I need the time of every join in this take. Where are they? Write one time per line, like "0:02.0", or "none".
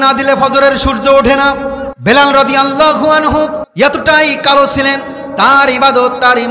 0:01.9
0:03.7